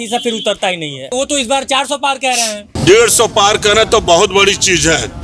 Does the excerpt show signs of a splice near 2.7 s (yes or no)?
yes